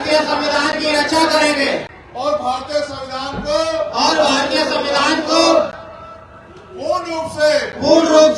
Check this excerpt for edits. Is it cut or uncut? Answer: cut